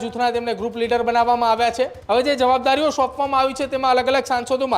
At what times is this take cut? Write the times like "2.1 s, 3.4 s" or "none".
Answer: 2.0 s

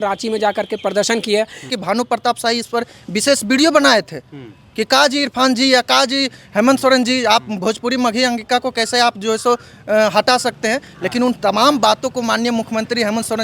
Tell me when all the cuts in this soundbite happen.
1.7 s

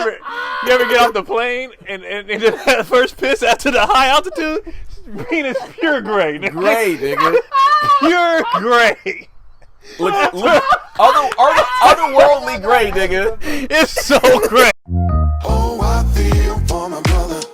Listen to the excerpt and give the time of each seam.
14.7 s

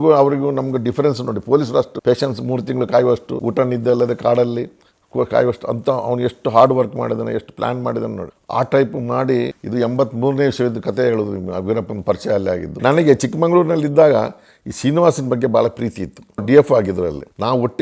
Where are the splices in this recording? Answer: 1.9 s, 3.3 s, 9.6 s, 12.7 s

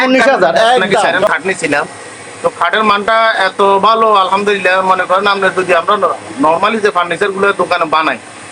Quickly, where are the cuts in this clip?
1.3 s

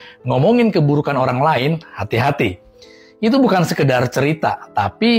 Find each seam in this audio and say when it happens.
none

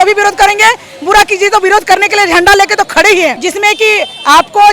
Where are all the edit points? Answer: 3.4 s

